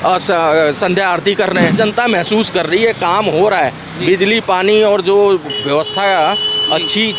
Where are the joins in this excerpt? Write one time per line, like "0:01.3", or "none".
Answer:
0:01.8